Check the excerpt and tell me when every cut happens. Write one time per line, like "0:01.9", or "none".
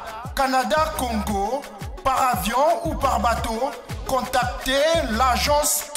none